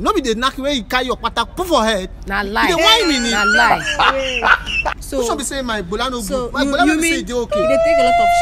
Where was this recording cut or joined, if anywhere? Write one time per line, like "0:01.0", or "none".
0:05.0